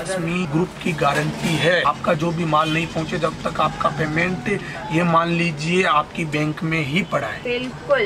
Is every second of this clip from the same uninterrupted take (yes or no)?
yes